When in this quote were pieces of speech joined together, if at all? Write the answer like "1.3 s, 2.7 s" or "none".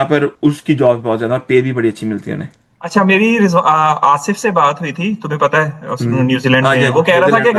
none